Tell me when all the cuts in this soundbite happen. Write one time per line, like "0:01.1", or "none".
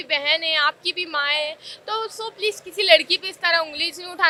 none